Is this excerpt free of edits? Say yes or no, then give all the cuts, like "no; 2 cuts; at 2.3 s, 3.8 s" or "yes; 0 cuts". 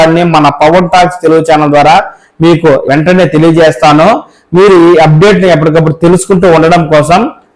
no; 1 cut; at 2.8 s